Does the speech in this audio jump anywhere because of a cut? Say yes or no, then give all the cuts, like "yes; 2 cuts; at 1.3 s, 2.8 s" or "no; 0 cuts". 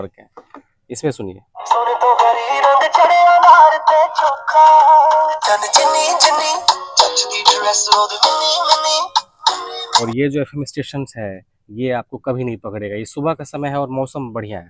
yes; 2 cuts; at 5.4 s, 9.6 s